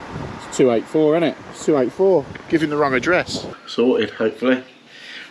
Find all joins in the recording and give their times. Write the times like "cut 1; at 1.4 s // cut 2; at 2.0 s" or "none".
cut 1; at 3.5 s